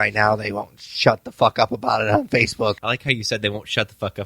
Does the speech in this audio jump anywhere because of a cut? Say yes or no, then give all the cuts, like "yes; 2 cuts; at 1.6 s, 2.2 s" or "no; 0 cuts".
yes; 1 cut; at 2.8 s